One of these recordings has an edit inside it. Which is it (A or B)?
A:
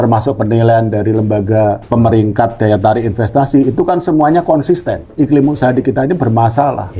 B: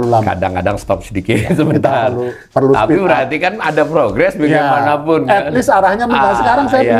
A